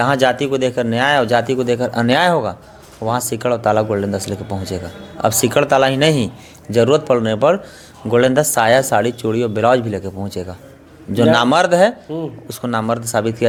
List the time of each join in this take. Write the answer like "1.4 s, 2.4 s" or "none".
none